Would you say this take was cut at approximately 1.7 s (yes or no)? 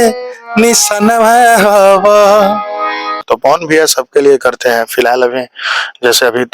no